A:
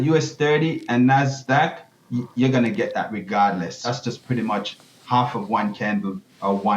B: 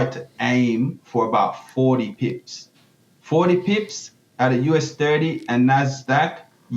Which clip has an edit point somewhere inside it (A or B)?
A